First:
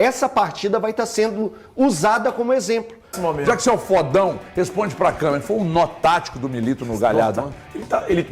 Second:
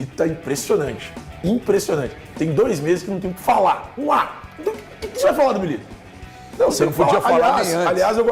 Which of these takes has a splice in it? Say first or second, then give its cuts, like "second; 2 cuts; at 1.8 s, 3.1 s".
first; 1 cut; at 3.2 s